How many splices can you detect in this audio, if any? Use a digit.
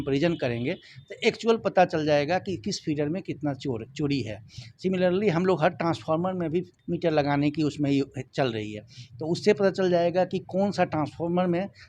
1